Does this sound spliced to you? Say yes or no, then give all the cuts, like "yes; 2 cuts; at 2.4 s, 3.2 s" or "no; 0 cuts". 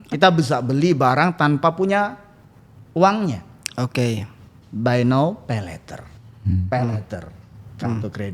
no; 0 cuts